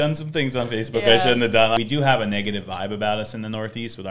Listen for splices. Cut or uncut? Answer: cut